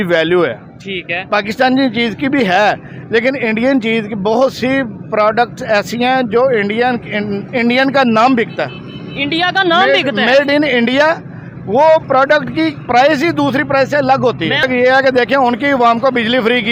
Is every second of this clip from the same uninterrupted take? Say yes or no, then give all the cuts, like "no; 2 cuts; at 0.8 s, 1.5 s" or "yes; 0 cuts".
no; 1 cut; at 14.6 s